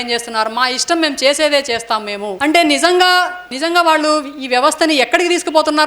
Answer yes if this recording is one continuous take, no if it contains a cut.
no